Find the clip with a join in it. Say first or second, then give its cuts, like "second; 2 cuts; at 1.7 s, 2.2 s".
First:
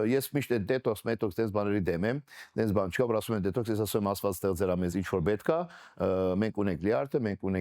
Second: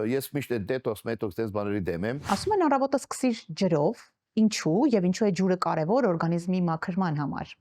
second; 1 cut; at 2.2 s